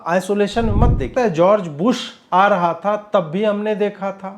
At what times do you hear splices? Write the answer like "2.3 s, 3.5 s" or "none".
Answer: 1.1 s